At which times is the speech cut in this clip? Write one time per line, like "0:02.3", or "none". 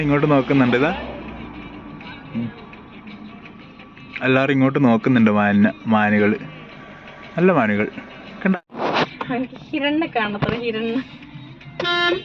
0:08.6